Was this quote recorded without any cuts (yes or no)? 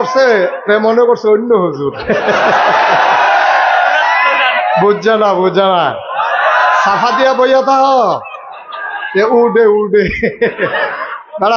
yes